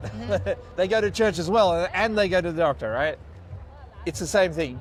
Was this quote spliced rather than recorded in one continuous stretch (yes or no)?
no